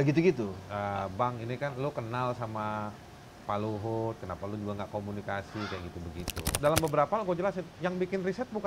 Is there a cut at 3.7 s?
no; 1 cut; at 6.5 s

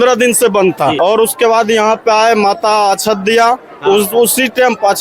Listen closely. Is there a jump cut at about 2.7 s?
no; 1 cut; at 1.0 s

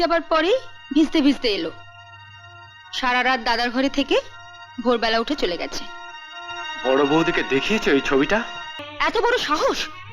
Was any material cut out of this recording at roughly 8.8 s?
yes; 1 cut; at 8.8 s

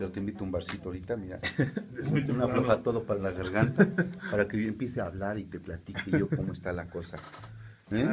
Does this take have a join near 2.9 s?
yes; 1 cut; at 2.9 s

